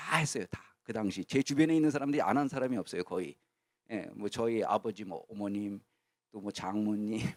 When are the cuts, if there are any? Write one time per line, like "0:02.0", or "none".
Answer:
none